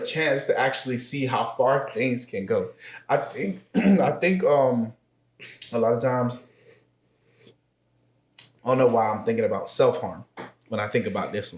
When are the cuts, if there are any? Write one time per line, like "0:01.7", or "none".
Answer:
none